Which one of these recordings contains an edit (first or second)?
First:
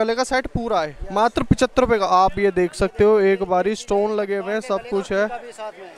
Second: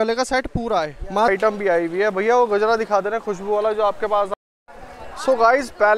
second